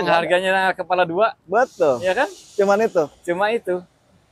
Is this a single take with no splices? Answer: yes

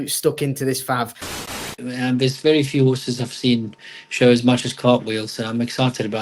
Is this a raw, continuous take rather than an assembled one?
no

